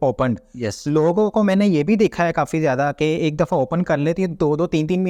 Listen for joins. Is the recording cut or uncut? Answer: uncut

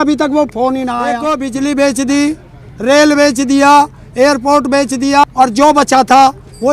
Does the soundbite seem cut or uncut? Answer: cut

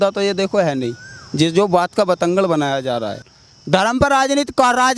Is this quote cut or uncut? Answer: uncut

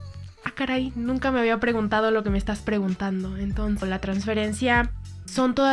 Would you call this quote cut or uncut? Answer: cut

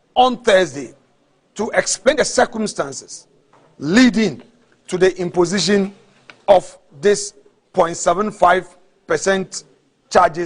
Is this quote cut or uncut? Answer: cut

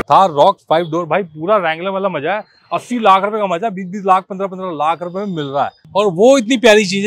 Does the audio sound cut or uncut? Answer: cut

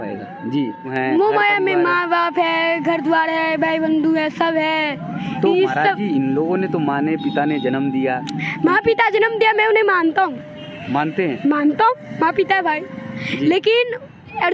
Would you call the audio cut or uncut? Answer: cut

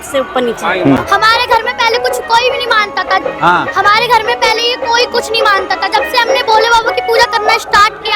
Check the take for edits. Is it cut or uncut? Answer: cut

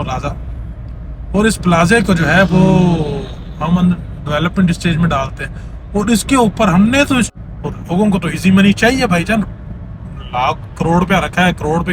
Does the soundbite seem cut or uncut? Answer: cut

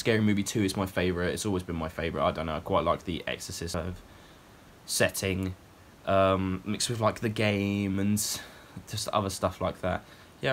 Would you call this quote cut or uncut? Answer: cut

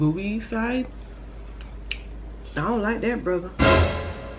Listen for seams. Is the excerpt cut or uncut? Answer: cut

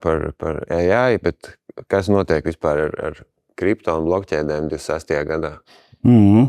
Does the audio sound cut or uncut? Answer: uncut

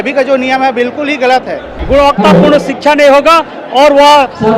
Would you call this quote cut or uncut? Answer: cut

